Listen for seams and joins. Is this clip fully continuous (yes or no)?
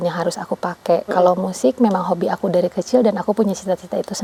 yes